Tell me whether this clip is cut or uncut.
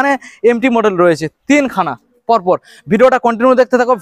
uncut